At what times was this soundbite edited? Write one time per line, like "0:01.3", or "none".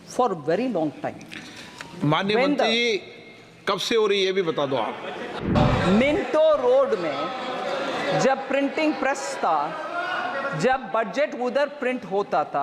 0:05.4